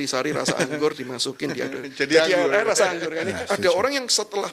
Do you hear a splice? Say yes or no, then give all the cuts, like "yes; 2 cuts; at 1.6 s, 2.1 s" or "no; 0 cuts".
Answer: yes; 1 cut; at 3.2 s